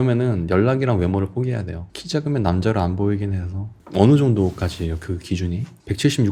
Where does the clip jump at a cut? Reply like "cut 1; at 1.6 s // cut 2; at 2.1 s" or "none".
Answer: none